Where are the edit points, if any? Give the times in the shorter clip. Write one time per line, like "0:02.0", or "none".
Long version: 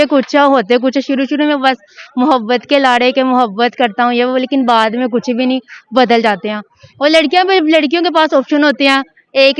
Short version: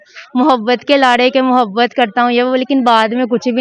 none